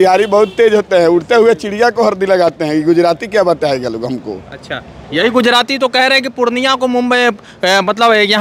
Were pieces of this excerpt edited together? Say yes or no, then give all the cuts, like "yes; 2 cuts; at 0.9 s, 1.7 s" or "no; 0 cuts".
no; 0 cuts